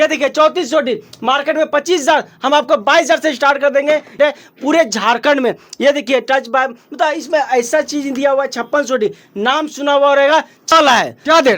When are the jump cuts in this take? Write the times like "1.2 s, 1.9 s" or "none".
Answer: 4.2 s, 10.7 s